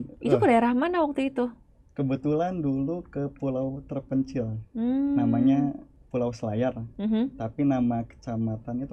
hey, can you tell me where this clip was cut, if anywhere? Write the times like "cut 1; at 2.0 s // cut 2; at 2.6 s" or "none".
none